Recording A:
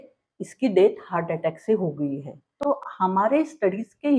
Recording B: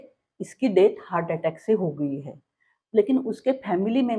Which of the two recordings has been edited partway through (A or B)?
A